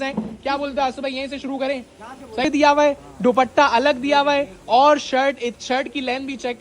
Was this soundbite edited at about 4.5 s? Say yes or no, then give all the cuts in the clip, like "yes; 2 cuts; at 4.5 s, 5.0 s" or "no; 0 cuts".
no; 1 cut; at 2.4 s